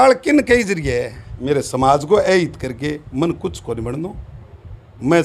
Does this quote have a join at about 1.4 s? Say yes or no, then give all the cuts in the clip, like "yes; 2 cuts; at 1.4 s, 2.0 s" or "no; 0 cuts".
yes; 1 cut; at 1.4 s